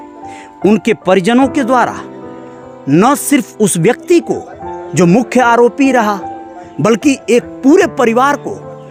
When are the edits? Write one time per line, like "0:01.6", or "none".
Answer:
none